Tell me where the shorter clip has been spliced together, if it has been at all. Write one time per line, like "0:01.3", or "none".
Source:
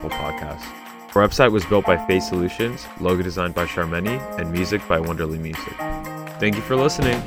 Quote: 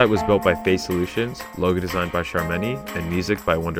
none